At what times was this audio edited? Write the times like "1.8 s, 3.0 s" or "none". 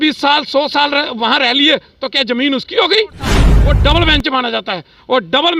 3.5 s